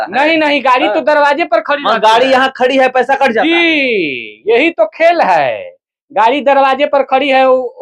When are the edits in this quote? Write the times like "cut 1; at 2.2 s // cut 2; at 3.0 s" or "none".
none

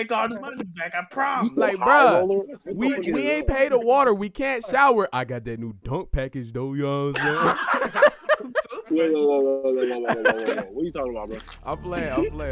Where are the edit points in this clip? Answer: none

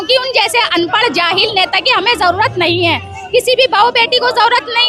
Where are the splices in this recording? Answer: none

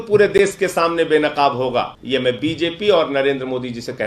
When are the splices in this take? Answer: cut 1; at 2.0 s

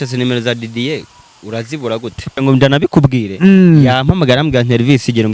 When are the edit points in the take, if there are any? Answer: cut 1; at 2.3 s

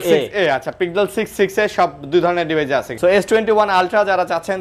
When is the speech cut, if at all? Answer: cut 1; at 2.9 s

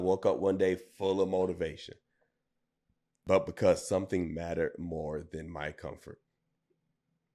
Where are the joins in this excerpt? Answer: cut 1; at 3.2 s

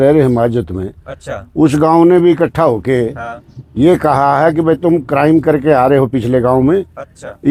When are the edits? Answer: none

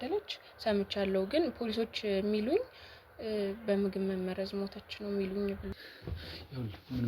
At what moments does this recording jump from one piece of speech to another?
cut 1; at 5.7 s

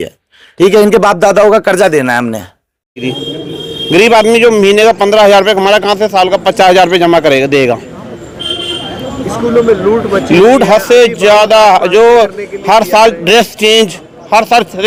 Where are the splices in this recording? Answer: none

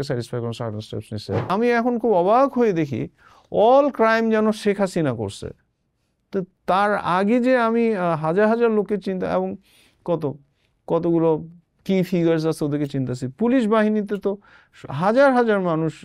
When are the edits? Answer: cut 1; at 1.5 s

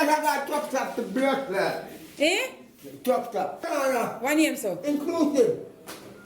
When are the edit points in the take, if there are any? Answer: cut 1; at 3.7 s

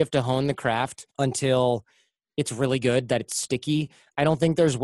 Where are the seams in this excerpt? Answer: cut 1; at 1.0 s

